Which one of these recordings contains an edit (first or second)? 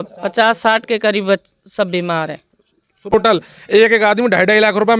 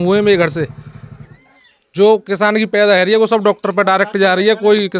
first